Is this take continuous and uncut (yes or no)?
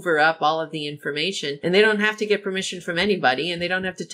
no